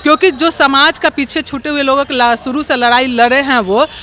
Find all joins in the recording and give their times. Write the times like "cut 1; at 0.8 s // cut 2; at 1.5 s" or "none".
none